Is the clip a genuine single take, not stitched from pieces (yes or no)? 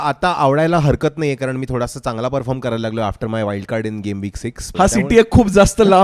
no